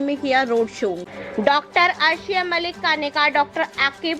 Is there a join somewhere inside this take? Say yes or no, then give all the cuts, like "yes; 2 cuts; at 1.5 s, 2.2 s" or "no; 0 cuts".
yes; 1 cut; at 1.0 s